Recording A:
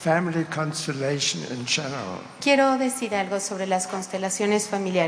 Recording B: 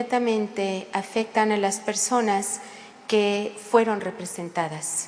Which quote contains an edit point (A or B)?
B